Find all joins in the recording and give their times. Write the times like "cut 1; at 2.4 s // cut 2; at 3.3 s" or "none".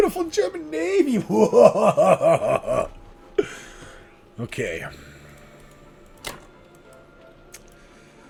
none

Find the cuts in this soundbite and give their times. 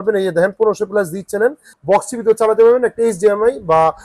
cut 1; at 1.7 s

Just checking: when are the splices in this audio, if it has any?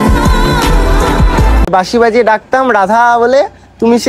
cut 1; at 1.7 s

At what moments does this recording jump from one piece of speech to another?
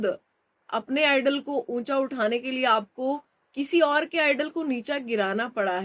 none

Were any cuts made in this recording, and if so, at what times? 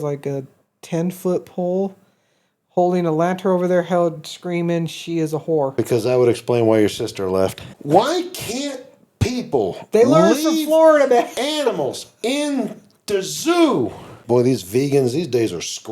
cut 1; at 5.7 s // cut 2; at 7.7 s // cut 3; at 14.2 s

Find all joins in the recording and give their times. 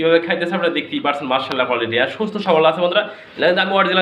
none

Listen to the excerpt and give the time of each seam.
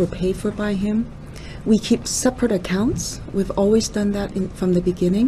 none

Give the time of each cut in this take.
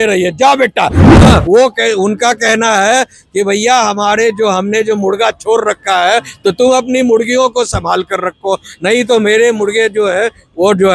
cut 1; at 1.0 s

